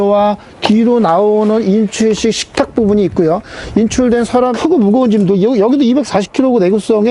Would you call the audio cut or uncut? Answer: cut